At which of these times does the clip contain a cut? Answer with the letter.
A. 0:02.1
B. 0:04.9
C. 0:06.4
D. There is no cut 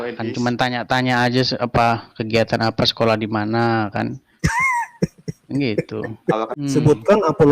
C